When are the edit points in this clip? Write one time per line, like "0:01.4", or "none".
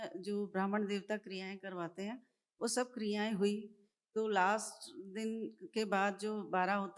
none